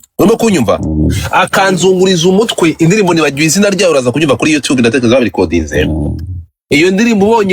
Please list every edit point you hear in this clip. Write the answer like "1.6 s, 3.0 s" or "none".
none